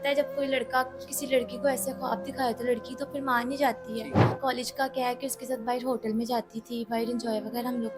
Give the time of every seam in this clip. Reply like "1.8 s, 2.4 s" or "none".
4.2 s

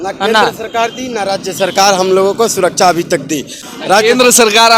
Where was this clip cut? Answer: 3.6 s

